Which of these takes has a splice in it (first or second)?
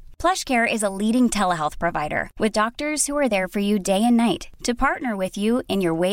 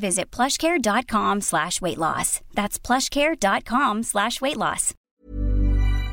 second